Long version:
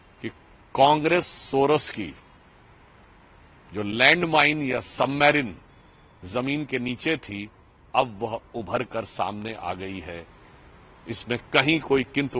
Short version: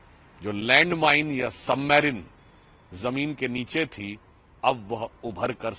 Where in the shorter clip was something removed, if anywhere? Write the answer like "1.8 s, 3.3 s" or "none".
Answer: none